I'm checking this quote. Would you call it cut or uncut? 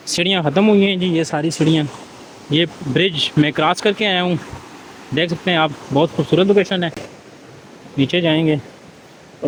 uncut